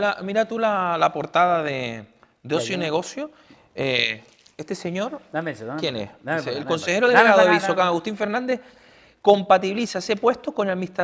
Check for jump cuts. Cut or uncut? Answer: uncut